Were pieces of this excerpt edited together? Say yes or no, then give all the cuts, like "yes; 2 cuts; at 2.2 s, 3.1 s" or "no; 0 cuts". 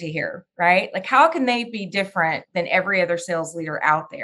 no; 0 cuts